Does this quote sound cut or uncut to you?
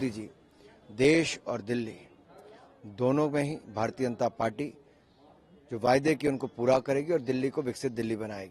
uncut